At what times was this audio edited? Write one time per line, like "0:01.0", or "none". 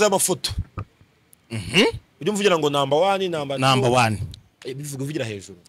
none